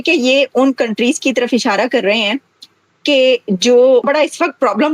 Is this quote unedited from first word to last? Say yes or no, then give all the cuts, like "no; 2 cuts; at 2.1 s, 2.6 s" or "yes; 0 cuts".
no; 1 cut; at 4.0 s